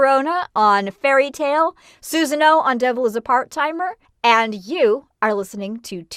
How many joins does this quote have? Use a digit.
0